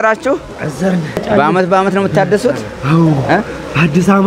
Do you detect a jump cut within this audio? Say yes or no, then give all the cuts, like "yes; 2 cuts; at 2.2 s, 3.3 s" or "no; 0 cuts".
yes; 1 cut; at 1.2 s